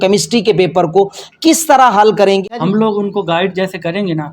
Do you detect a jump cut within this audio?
yes; 1 cut; at 2.4 s

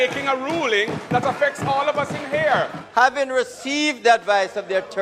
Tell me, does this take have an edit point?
yes; 1 cut; at 2.8 s

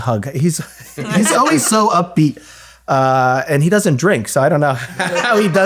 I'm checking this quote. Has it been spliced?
no; 0 cuts

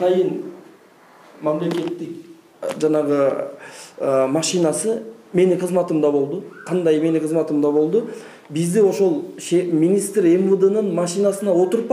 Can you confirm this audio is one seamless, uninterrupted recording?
yes; 0 cuts

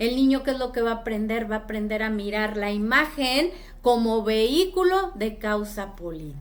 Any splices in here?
no; 0 cuts

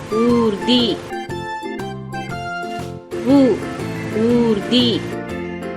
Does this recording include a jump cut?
yes; 3 cuts; at 1.0 s, 2.8 s, 5.0 s

